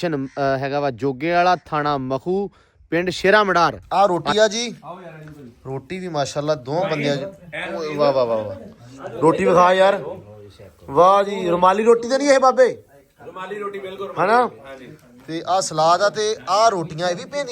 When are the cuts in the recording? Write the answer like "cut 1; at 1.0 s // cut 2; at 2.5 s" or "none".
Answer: cut 1; at 3.8 s